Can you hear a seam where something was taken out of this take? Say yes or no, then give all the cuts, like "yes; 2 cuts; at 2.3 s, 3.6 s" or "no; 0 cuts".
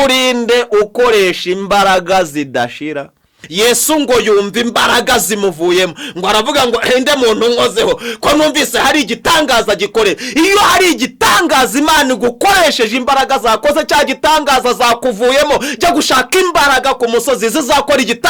yes; 1 cut; at 3.4 s